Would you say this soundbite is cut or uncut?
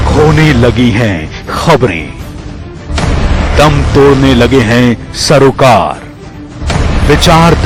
uncut